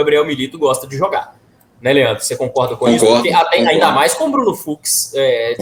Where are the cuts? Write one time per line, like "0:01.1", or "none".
none

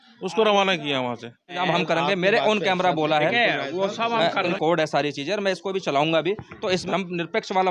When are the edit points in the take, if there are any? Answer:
0:01.6
0:04.5
0:06.8

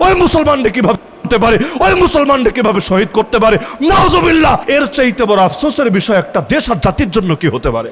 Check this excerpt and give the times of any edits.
0:04.6

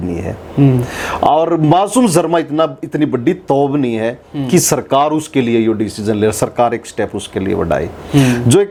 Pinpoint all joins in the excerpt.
none

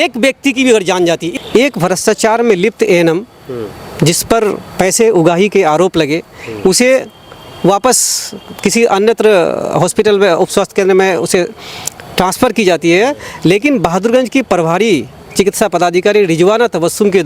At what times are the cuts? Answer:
0:01.3

